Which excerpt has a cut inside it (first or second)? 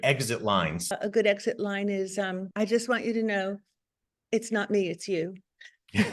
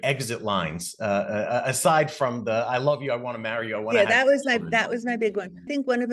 first